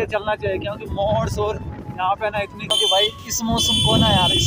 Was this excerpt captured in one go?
no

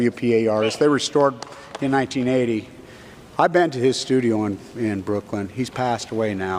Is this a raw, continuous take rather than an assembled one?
no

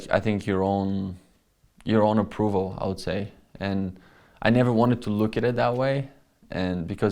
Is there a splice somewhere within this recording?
no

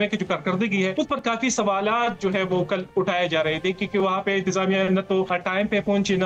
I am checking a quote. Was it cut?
yes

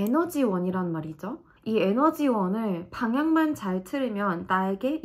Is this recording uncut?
yes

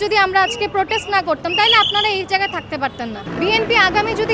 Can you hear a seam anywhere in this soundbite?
yes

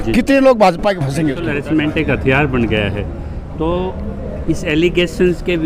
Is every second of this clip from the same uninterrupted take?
no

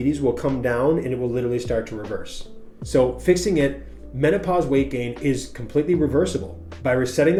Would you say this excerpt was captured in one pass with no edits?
yes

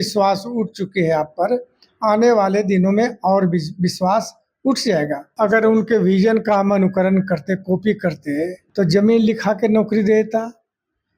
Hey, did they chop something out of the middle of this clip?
yes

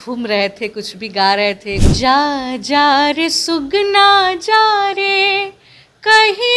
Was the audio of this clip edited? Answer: yes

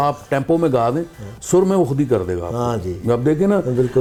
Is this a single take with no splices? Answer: yes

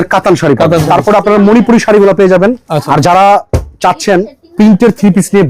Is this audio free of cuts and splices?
no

